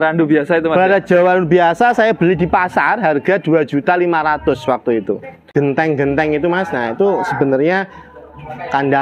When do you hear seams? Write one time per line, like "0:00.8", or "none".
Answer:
0:05.5